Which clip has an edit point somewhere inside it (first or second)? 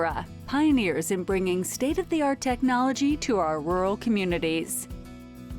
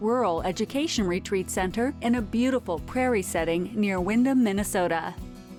first